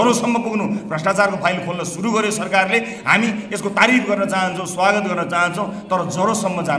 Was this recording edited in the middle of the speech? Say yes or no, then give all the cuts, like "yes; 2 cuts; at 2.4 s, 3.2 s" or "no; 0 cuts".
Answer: no; 0 cuts